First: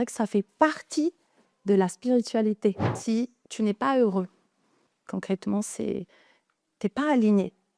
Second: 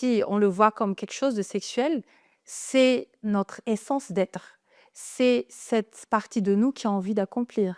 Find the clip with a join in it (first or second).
first